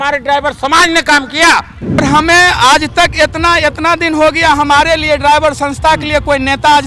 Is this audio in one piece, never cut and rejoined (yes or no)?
no